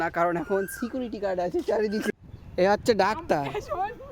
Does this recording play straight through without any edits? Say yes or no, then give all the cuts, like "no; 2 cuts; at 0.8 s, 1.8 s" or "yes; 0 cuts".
no; 1 cut; at 2.1 s